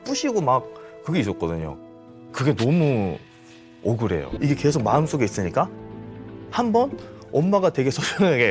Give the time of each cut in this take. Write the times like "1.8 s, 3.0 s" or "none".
4.4 s